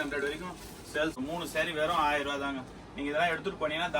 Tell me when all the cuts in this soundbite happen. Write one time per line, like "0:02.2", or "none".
0:01.2